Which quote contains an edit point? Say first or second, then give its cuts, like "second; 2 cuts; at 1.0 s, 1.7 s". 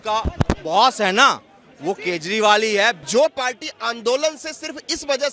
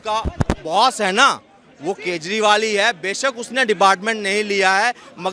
first; 1 cut; at 3.0 s